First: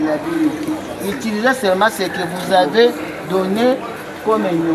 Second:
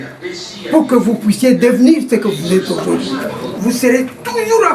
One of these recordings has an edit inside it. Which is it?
second; 1 cut; at 3.4 s

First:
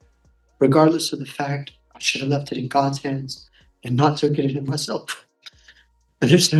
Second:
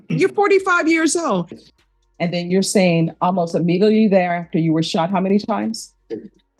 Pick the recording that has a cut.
second; 1 cut; at 1.5 s

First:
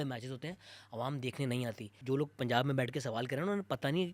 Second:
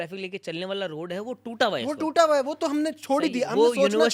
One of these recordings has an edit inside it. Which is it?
first; 1 cut; at 1.9 s

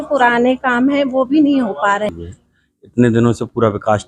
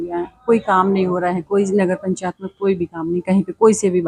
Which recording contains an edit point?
first; 1 cut; at 2.1 s

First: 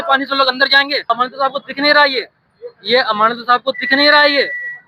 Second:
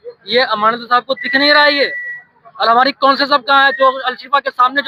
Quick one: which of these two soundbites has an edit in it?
first; 1 cut; at 1.0 s

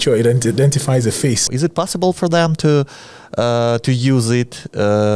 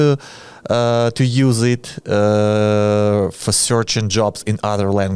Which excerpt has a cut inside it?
first; 1 cut; at 1.5 s

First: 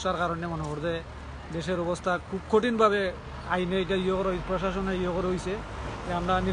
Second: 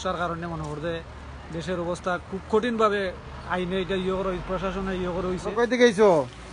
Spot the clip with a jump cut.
second; 1 cut; at 5.5 s

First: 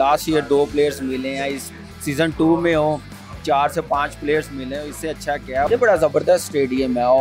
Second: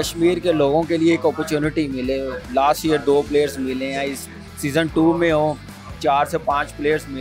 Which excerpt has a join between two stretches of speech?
first; 1 cut; at 5.7 s

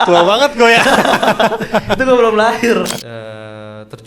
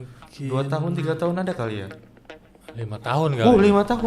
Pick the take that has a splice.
first; 1 cut; at 3.0 s

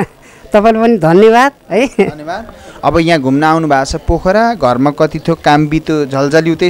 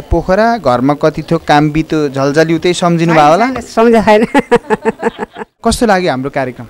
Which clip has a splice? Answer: second; 1 cut; at 5.6 s

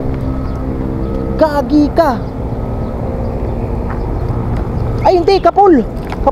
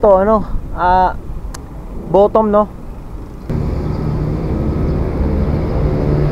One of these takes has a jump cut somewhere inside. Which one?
second; 1 cut; at 3.5 s

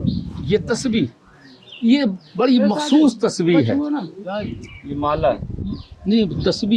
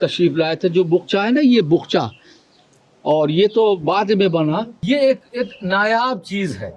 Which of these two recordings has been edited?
second; 1 cut; at 4.7 s

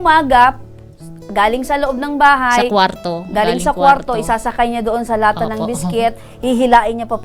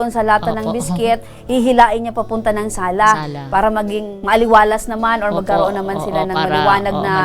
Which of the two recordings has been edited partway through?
second; 1 cut; at 4.1 s

